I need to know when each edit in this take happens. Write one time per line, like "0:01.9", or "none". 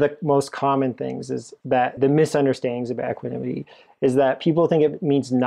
0:02.0